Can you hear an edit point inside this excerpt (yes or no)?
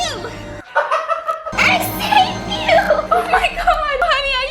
no